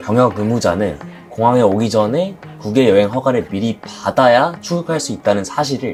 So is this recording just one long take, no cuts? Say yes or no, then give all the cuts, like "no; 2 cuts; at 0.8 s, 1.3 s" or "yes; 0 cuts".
yes; 0 cuts